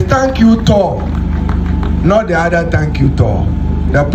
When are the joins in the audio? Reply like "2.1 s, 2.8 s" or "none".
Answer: none